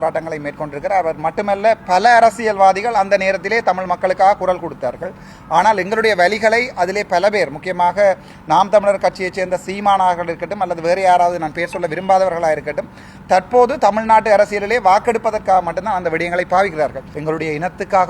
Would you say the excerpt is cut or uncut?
cut